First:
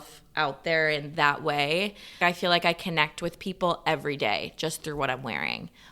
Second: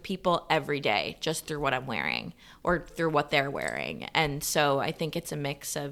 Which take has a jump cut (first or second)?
first